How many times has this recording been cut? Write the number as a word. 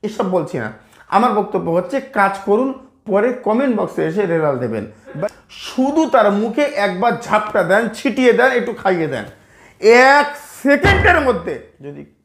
one